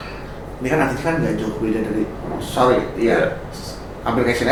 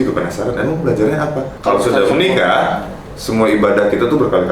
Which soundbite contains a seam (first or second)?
second